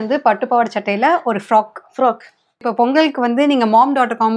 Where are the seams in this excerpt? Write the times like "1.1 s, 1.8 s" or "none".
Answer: 2.6 s